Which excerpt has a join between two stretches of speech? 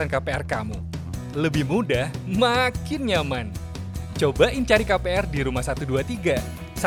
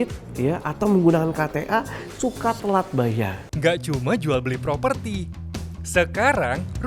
second; 1 cut; at 3.4 s

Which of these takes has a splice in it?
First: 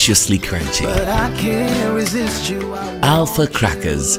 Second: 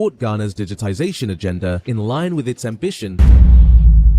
second; 1 cut; at 3.1 s

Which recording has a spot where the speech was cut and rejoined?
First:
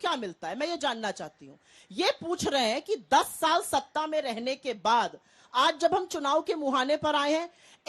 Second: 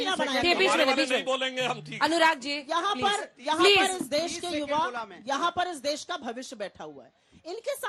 first; 1 cut; at 2.0 s

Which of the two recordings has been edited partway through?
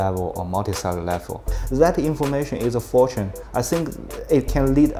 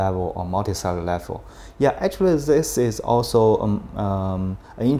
first; 1 cut; at 1.5 s

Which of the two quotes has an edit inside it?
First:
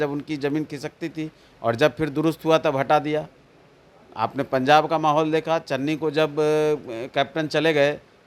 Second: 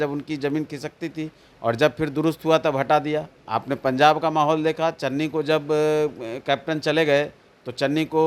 second; 1 cut; at 3.4 s

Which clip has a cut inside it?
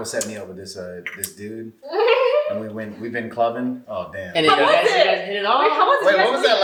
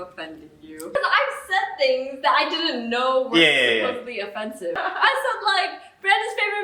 second; 2 cuts; at 0.9 s, 4.8 s

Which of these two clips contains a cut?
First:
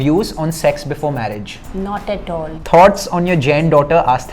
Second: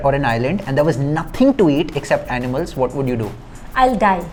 first; 2 cuts; at 1.6 s, 2.6 s

